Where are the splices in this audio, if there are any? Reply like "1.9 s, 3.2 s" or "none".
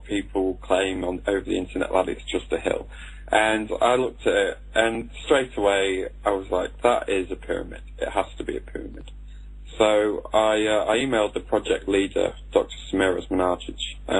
1.0 s